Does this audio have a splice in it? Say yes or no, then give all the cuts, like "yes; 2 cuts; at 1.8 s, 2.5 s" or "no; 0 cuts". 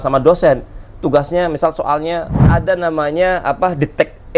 yes; 1 cut; at 2.4 s